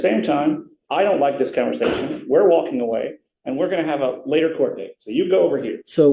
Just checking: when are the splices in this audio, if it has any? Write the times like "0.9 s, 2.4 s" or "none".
none